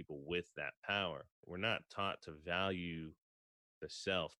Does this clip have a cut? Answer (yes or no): yes